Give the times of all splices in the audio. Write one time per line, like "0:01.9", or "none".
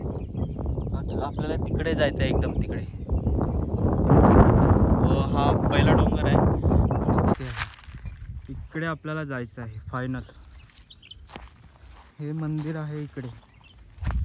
0:07.4